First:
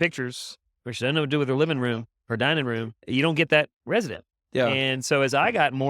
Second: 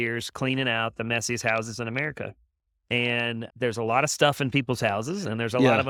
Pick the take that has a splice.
first; 1 cut; at 2.9 s

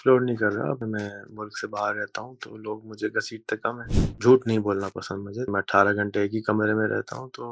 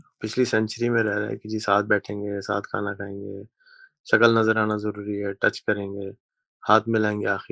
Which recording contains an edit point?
first; 3 cuts; at 0.8 s, 4.2 s, 5.5 s

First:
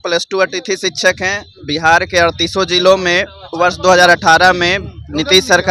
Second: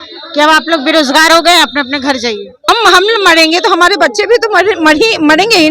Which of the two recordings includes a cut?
second; 1 cut; at 2.7 s

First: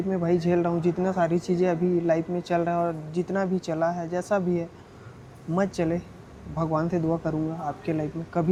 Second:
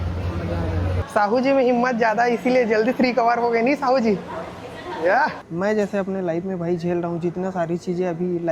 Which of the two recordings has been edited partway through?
second; 2 cuts; at 1.0 s, 5.4 s

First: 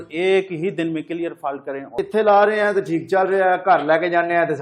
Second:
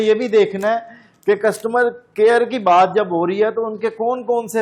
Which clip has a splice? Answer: first; 1 cut; at 1.9 s

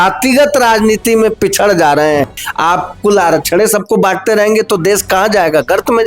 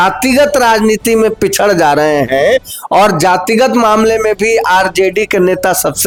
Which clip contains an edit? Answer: first; 1 cut; at 2.3 s

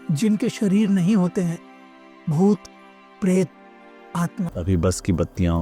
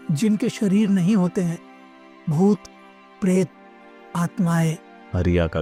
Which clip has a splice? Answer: first; 1 cut; at 4.4 s

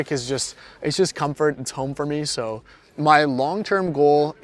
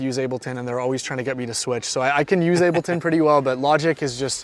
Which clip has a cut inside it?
first; 1 cut; at 2.8 s

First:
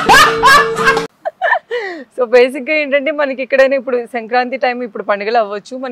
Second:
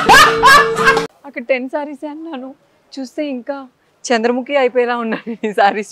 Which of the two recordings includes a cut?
second; 1 cut; at 1.1 s

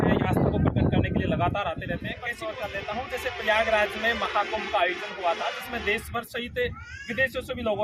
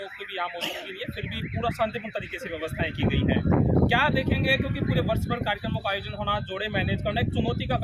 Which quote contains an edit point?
first; 1 cut; at 2.3 s

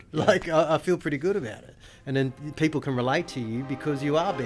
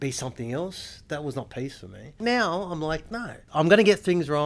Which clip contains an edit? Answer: second; 2 cuts; at 2.2 s, 3.4 s

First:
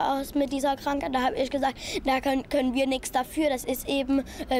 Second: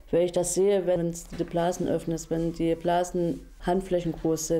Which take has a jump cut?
second; 2 cuts; at 1.0 s, 3.5 s

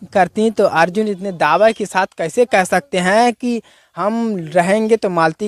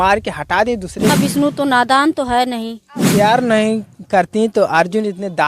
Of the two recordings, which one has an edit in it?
second; 2 cuts; at 1.1 s, 3.1 s

